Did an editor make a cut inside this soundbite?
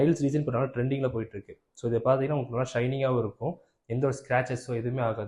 no; 0 cuts

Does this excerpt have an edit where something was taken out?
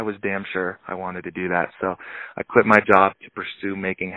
no; 0 cuts

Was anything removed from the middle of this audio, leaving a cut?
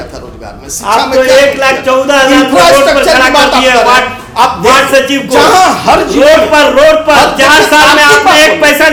no; 0 cuts

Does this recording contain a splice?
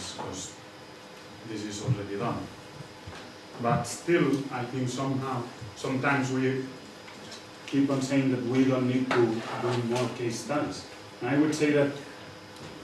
yes; 1 cut; at 2.4 s

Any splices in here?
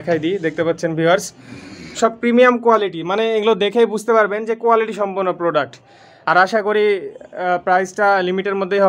no; 0 cuts

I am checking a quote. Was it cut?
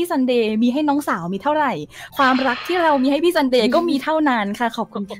no; 0 cuts

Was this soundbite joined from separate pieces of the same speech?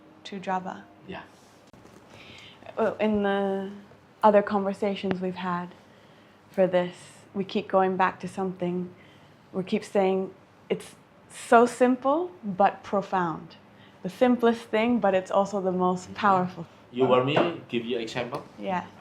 yes; 1 cut; at 1.8 s

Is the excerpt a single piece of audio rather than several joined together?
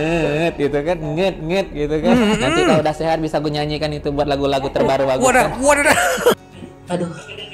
no; 1 cut; at 6.4 s

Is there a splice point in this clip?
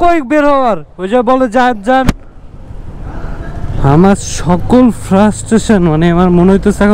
yes; 1 cut; at 3.7 s

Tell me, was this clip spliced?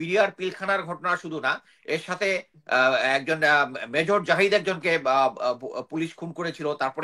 no; 0 cuts

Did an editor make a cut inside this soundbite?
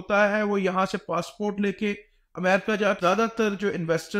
yes; 1 cut; at 3.0 s

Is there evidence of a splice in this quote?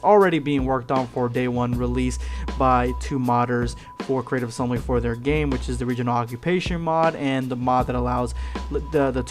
no; 0 cuts

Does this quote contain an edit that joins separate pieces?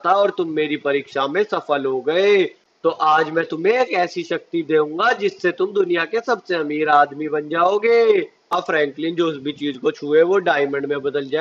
yes; 2 cuts; at 2.6 s, 8.5 s

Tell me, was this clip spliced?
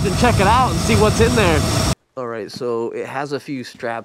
yes; 1 cut; at 1.9 s

